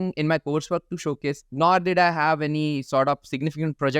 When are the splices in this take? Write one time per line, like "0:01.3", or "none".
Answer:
0:01.5